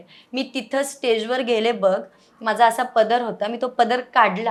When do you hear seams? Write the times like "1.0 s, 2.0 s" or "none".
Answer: none